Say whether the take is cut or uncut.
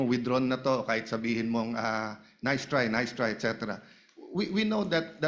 uncut